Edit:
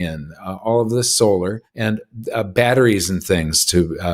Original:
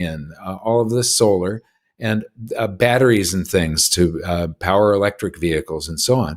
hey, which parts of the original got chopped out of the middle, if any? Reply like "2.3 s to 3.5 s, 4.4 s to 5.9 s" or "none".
1.7 s to 1.9 s